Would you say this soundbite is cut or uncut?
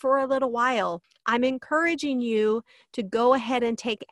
cut